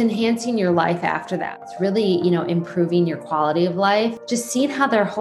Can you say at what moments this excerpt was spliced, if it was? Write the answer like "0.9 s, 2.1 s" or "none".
1.6 s, 4.2 s